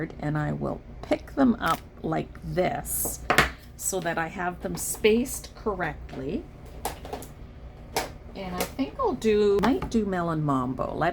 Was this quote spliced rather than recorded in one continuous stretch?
yes; 1 cut; at 9.6 s

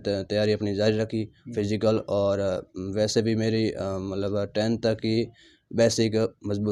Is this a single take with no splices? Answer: yes; 0 cuts

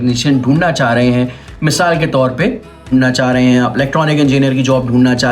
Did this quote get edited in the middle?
yes; 1 cut; at 2.9 s

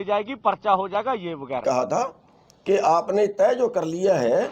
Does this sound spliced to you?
yes; 1 cut; at 1.6 s

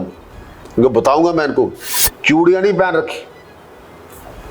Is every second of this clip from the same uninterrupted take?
no; 1 cut; at 1.9 s

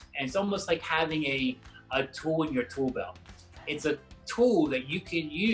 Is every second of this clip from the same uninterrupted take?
yes; 0 cuts

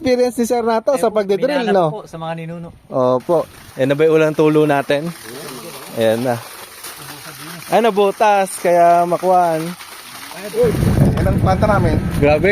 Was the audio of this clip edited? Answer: yes; 2 cuts; at 3.6 s, 10.8 s

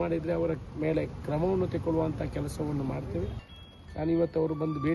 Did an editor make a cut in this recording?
yes; 1 cut; at 3.4 s

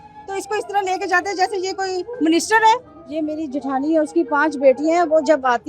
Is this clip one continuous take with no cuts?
no; 1 cut; at 3.0 s

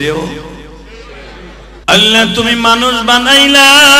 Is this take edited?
yes; 1 cut; at 1.8 s

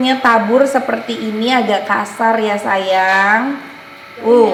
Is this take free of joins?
yes; 0 cuts

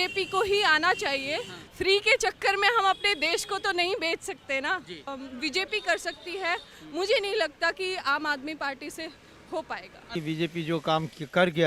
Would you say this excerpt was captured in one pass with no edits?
no; 3 cuts; at 1.6 s, 5.1 s, 10.1 s

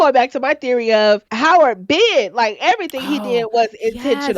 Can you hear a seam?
yes; 1 cut; at 1.3 s

